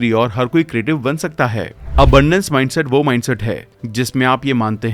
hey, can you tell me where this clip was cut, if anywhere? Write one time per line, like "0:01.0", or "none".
0:01.8